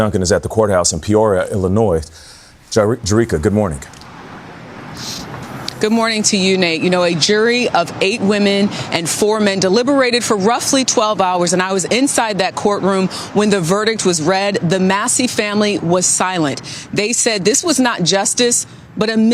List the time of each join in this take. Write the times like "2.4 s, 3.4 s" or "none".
none